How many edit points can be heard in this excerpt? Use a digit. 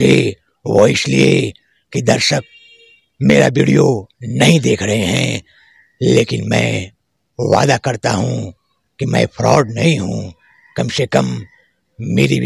0